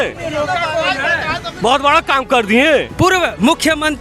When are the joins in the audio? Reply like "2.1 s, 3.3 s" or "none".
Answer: 2.9 s